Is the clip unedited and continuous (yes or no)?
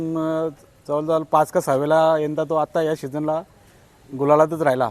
yes